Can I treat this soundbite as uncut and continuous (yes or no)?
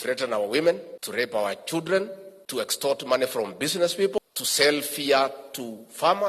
no